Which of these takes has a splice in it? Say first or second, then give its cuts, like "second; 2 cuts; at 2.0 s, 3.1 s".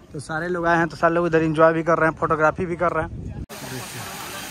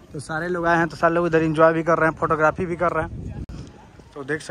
first; 1 cut; at 3.5 s